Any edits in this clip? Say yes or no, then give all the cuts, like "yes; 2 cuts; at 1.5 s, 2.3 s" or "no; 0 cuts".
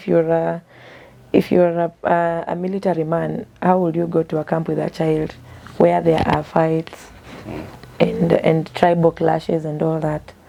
no; 0 cuts